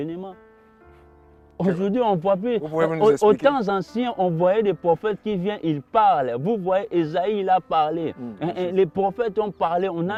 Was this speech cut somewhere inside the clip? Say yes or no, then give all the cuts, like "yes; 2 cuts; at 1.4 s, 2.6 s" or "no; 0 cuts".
no; 0 cuts